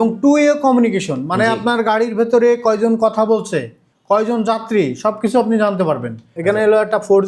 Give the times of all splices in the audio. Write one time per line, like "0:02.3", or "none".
0:06.3